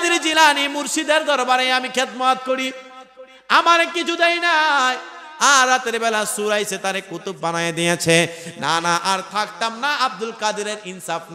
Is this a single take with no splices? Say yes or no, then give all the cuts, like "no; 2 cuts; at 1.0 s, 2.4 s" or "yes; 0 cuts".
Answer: yes; 0 cuts